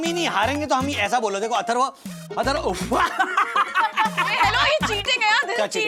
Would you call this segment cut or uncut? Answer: uncut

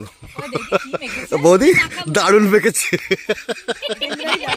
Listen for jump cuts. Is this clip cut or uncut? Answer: uncut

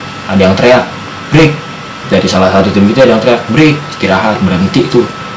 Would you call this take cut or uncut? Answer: uncut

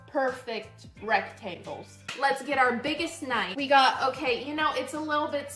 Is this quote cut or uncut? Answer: cut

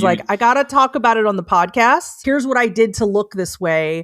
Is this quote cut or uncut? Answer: cut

